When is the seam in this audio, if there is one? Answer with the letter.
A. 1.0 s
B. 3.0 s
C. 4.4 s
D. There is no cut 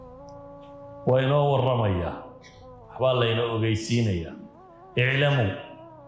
A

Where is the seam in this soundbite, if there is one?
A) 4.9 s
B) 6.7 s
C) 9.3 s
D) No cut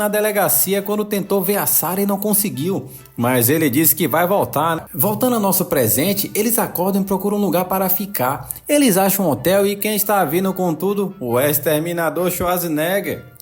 A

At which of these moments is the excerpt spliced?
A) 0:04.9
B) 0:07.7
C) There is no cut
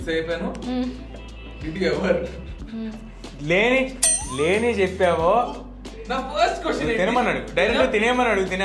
C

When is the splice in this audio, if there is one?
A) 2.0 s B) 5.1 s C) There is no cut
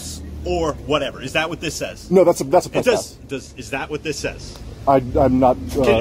C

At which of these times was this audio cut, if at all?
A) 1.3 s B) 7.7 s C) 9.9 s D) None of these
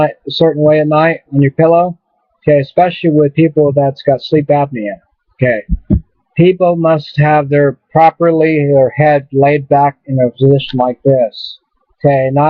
D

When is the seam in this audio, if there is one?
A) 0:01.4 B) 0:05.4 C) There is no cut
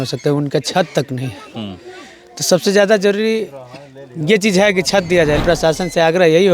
B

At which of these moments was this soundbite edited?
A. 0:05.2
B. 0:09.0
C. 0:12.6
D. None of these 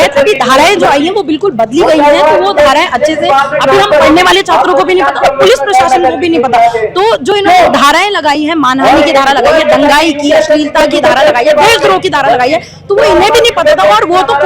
D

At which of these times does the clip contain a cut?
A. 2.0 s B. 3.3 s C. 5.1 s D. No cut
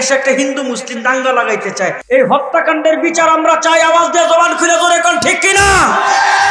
A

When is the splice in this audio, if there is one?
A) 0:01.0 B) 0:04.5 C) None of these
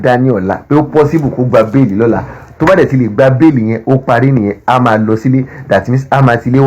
C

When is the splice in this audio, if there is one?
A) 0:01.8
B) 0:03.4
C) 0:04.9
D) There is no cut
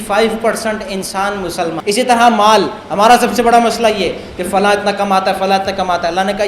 A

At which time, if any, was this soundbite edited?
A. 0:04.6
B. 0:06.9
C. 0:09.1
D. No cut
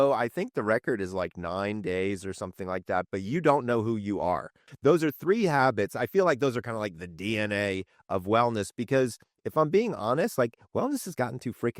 A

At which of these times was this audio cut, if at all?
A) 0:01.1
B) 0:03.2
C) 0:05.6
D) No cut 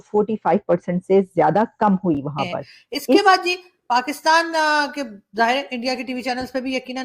B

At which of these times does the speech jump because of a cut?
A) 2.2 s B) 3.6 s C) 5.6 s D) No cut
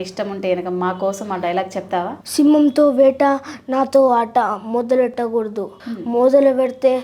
A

